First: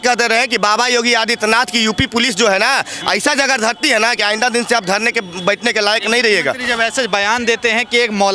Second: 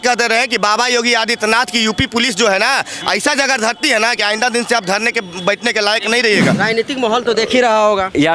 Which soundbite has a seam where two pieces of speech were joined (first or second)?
second